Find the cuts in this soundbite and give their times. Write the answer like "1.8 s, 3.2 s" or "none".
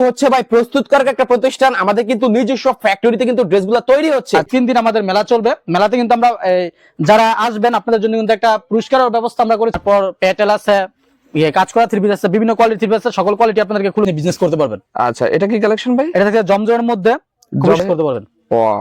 4.5 s, 9.8 s, 14.1 s, 17.8 s